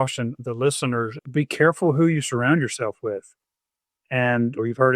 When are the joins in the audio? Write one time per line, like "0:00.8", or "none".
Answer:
0:01.2